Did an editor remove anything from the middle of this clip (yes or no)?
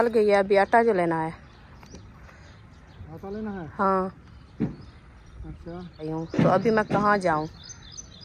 yes